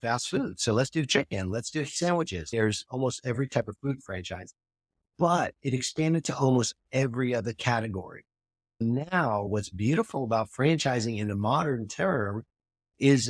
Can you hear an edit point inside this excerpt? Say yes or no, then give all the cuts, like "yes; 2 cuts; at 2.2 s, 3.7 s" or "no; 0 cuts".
yes; 2 cuts; at 2.4 s, 9.5 s